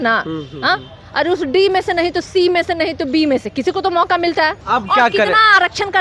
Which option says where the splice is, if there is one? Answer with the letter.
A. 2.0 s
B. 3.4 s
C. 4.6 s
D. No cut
C